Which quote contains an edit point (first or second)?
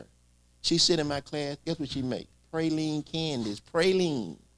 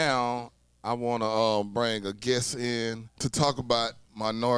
second